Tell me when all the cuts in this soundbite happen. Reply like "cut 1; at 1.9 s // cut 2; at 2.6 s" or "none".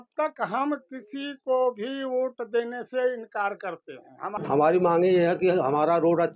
cut 1; at 4.3 s